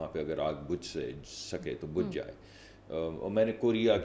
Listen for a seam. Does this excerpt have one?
no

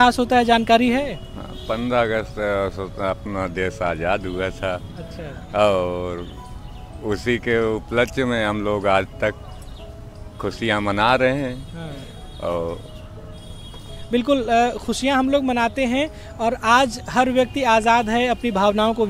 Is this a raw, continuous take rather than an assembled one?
yes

